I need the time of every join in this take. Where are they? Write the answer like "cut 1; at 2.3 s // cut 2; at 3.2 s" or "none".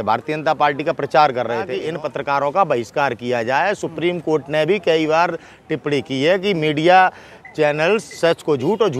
cut 1; at 1.8 s